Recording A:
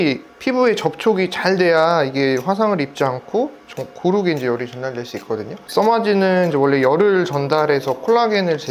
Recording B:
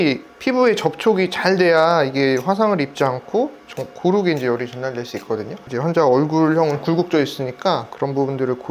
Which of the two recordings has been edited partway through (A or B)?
A